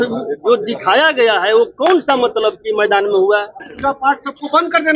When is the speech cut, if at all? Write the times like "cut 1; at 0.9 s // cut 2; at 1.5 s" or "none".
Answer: cut 1; at 3.6 s